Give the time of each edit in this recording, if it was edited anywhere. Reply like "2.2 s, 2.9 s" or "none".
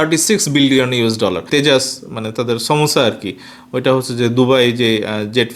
1.5 s